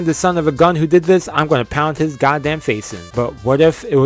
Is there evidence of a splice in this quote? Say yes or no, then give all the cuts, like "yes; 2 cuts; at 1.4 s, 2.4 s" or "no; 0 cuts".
yes; 1 cut; at 3.0 s